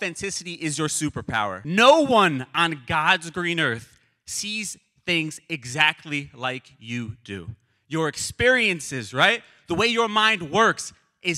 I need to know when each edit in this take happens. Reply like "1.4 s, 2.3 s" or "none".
1.6 s